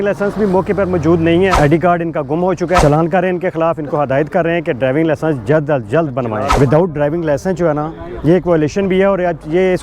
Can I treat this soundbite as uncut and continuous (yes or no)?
no